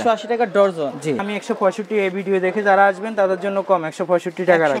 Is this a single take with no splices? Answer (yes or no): no